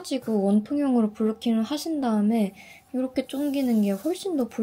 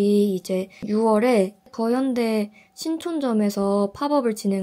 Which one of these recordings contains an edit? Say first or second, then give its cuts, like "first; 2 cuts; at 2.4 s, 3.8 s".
second; 2 cuts; at 0.9 s, 1.7 s